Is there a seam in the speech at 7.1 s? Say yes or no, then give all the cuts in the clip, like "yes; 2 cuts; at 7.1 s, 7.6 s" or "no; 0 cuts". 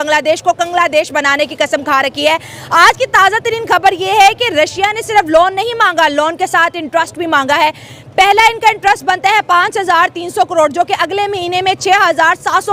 no; 0 cuts